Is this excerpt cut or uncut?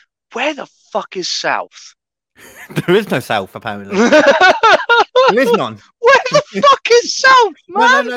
uncut